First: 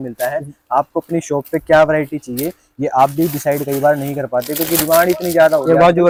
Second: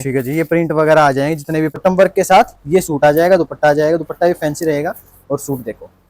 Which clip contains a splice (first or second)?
second